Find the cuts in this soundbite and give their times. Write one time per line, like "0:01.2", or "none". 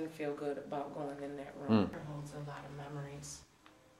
0:01.9